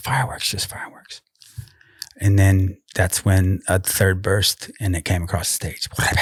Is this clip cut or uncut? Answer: uncut